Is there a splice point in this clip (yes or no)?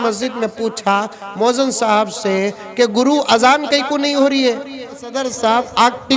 yes